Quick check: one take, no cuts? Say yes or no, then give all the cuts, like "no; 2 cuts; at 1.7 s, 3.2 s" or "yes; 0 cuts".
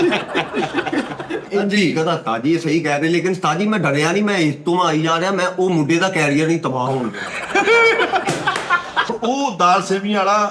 no; 2 cuts; at 1.4 s, 9.1 s